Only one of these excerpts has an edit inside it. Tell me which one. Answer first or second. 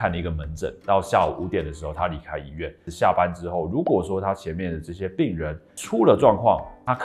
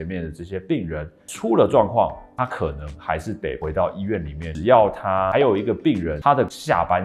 second